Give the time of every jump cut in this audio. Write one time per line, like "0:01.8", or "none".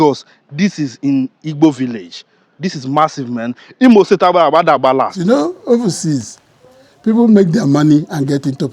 0:05.1

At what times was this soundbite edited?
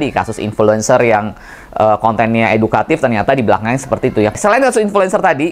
0:04.3

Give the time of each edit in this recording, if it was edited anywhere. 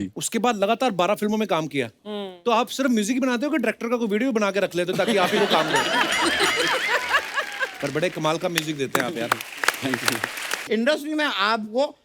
0:10.6

